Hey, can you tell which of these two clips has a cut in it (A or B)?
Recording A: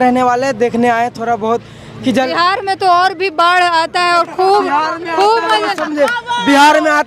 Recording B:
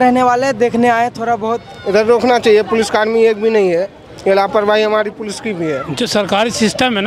B